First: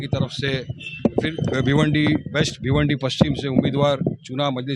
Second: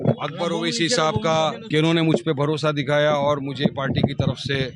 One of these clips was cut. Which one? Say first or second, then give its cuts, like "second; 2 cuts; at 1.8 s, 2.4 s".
second; 1 cut; at 1.6 s